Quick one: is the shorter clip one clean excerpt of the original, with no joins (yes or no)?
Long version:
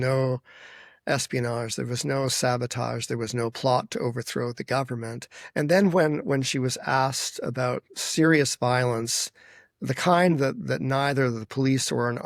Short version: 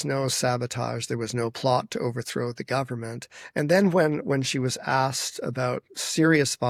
yes